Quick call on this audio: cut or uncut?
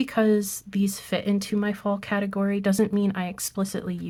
uncut